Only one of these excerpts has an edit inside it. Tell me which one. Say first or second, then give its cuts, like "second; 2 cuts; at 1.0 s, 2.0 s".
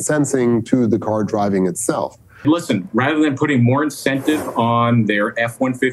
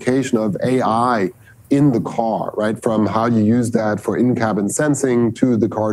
first; 1 cut; at 2.2 s